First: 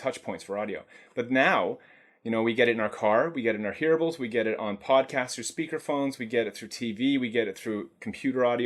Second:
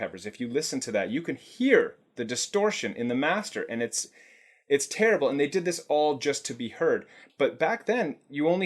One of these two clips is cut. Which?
second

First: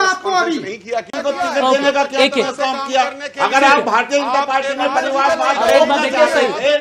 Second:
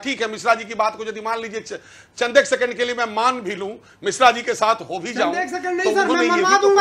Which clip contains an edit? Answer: first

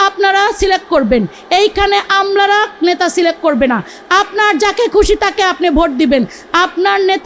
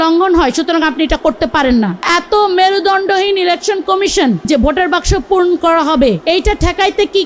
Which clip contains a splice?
second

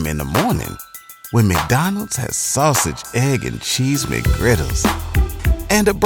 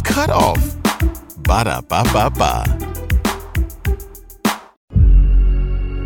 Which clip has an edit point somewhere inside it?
second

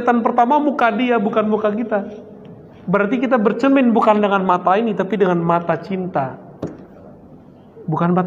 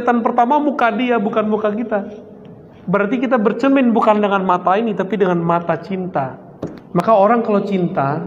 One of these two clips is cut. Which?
second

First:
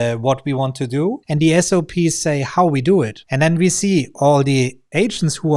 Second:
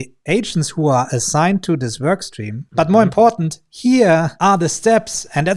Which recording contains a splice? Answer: second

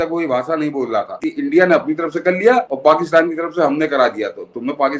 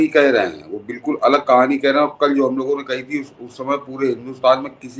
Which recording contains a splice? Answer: first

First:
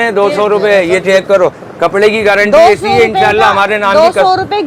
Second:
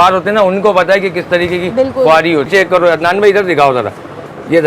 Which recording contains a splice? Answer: second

